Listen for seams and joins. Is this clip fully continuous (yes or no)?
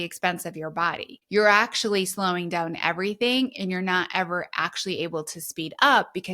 no